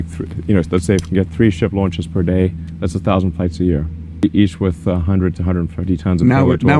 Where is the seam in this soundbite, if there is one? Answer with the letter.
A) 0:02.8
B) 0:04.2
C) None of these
B